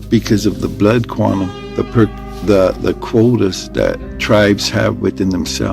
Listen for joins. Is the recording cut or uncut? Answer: uncut